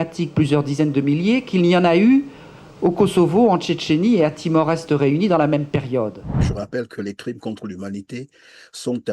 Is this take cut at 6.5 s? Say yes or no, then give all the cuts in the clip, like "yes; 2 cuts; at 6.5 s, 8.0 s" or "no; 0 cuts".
yes; 1 cut; at 6.5 s